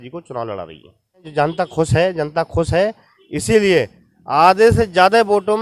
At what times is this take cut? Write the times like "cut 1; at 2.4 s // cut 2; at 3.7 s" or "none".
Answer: cut 1; at 1.3 s